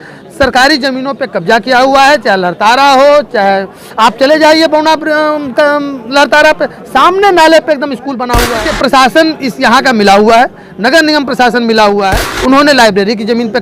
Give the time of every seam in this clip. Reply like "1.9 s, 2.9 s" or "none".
8.7 s, 12.3 s

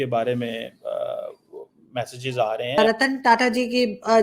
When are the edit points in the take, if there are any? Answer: 2.8 s

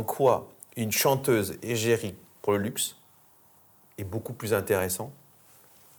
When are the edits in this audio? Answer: none

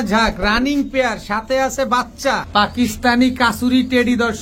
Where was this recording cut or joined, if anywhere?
2.4 s

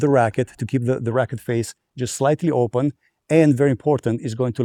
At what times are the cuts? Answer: none

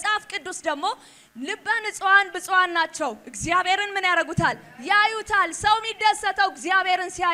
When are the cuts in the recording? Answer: none

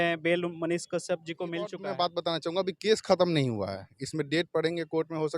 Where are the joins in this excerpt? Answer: 1.8 s

